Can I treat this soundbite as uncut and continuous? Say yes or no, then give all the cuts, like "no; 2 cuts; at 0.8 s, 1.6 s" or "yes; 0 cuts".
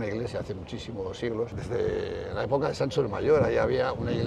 no; 1 cut; at 1.6 s